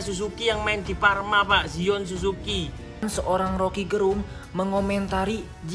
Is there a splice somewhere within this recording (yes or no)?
yes